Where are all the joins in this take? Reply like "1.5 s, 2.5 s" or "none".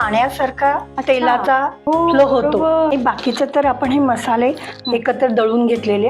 0.9 s, 1.8 s, 2.9 s